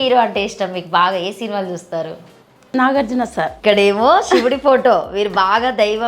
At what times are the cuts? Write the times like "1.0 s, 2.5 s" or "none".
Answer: 3.5 s